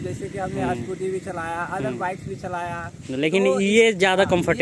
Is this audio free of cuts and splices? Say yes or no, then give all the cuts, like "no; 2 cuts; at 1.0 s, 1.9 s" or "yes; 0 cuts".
yes; 0 cuts